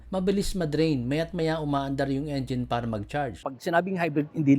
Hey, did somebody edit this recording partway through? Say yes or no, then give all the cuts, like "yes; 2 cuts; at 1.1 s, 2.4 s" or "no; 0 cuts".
yes; 1 cut; at 3.4 s